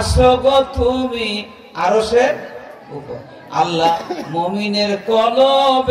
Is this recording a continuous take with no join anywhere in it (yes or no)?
yes